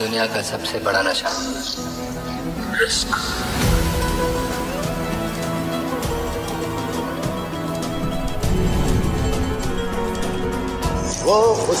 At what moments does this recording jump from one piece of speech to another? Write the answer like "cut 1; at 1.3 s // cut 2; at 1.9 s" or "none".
cut 1; at 2.6 s